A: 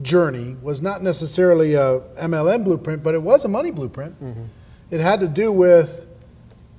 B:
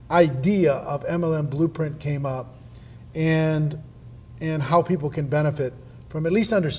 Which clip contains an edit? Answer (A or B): A